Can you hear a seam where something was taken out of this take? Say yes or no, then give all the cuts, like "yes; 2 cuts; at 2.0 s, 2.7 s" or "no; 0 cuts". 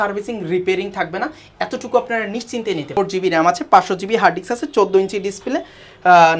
yes; 1 cut; at 3.0 s